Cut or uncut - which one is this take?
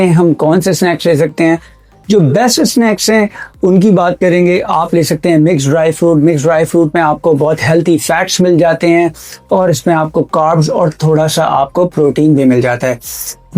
uncut